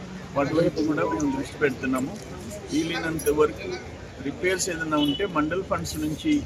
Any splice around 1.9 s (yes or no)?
no